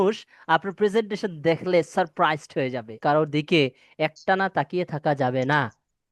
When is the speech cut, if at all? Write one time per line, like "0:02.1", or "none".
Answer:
0:03.0